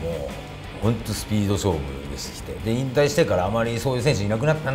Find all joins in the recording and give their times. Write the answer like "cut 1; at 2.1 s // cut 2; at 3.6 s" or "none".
none